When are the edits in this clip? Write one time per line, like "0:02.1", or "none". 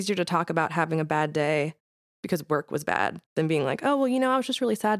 none